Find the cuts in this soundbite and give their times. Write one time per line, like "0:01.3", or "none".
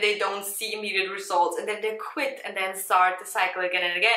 none